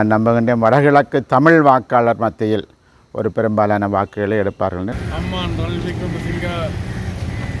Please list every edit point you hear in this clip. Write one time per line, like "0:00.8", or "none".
0:04.9